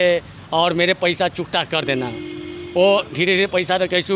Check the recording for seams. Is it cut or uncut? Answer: uncut